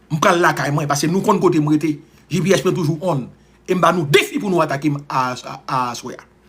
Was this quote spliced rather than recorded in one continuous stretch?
no; 0 cuts

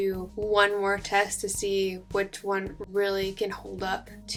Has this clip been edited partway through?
no; 0 cuts

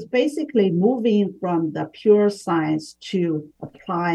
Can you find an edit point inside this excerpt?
no; 0 cuts

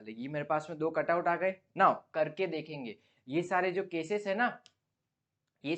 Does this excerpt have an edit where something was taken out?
yes; 1 cut; at 2.0 s

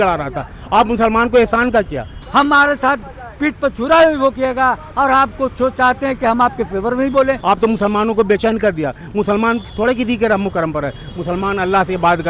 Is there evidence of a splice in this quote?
yes; 2 cuts; at 2.2 s, 7.4 s

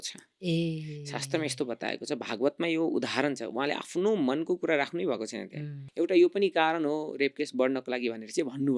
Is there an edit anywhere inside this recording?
yes; 1 cut; at 5.8 s

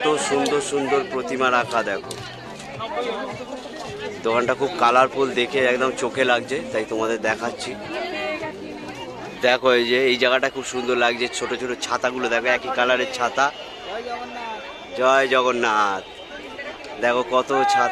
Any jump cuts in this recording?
no; 0 cuts

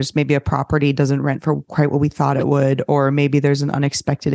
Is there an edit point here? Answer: no; 0 cuts

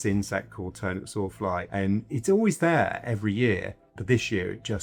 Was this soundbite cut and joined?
no; 0 cuts

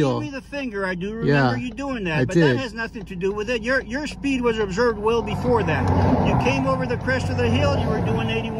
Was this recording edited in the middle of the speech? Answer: no; 0 cuts

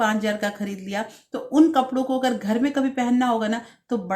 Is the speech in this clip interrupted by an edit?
no; 0 cuts

